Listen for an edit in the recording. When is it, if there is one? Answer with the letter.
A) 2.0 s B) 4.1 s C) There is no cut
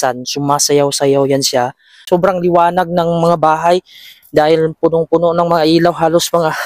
A